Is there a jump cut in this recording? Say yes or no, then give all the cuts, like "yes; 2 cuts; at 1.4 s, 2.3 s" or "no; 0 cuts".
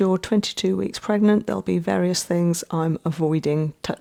no; 0 cuts